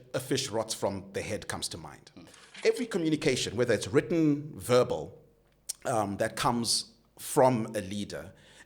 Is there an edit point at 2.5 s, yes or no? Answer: yes